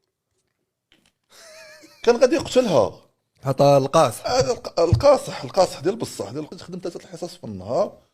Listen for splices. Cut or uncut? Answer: cut